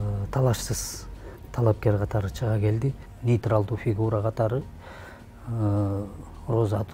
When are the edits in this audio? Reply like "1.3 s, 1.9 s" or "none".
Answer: 3.0 s